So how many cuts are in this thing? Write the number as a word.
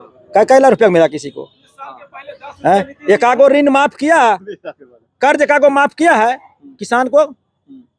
zero